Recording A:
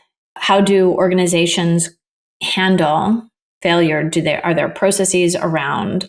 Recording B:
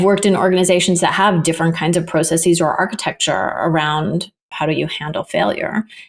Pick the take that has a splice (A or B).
B